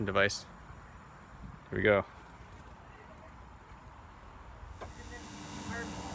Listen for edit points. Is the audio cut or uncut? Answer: cut